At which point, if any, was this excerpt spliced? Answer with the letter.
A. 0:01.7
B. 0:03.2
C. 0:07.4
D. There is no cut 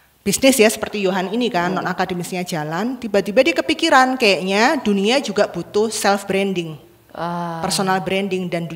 D